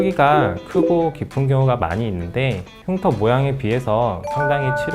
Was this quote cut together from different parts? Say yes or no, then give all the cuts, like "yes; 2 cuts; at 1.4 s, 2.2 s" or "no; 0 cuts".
no; 0 cuts